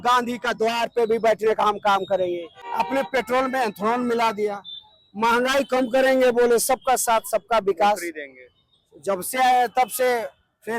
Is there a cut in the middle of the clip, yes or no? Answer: yes